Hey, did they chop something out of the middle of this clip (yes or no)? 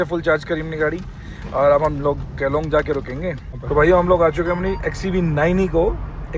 yes